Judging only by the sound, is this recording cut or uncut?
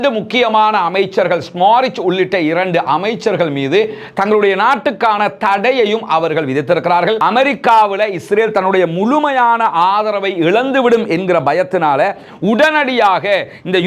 cut